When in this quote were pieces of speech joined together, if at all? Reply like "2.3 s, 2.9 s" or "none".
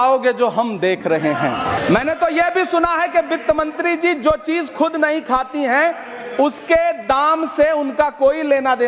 1.8 s